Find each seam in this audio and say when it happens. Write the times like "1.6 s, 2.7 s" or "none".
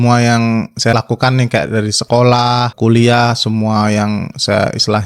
0.9 s, 2.7 s